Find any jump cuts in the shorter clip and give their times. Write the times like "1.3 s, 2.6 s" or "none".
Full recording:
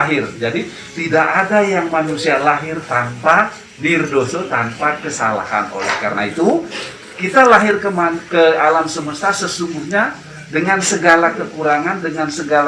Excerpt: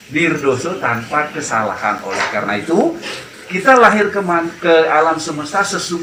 none